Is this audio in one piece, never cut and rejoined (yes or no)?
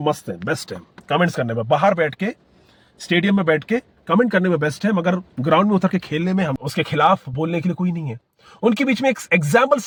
yes